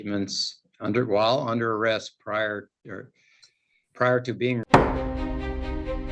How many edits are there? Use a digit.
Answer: 1